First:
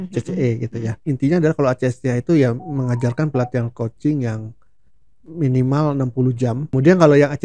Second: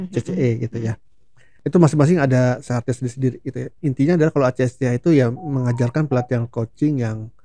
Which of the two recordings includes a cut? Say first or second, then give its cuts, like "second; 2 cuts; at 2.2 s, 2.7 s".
first; 2 cuts; at 1.0 s, 6.6 s